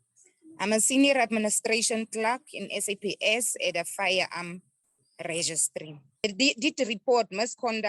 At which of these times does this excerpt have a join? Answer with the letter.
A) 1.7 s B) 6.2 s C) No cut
B